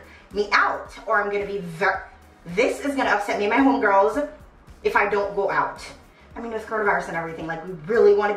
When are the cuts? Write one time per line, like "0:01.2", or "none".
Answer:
none